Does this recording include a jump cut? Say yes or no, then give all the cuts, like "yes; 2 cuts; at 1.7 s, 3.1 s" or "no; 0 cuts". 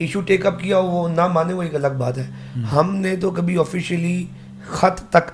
no; 0 cuts